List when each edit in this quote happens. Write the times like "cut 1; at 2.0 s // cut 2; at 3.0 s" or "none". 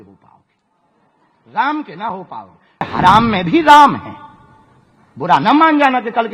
cut 1; at 2.9 s